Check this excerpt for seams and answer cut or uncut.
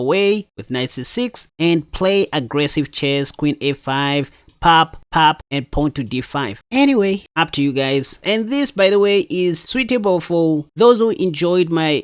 cut